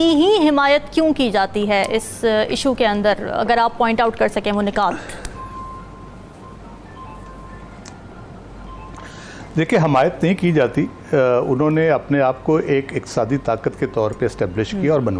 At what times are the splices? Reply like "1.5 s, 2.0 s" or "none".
none